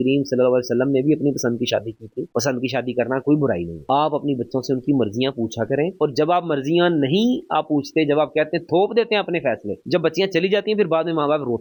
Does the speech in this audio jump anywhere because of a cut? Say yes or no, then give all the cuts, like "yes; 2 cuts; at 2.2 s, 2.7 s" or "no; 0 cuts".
no; 0 cuts